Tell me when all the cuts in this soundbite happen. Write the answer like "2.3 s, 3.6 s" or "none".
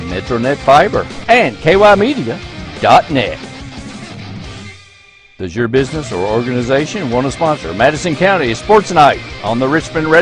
1.1 s